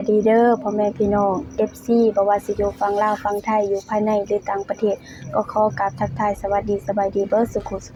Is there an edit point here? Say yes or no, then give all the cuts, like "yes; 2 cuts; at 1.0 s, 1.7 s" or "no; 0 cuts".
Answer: no; 0 cuts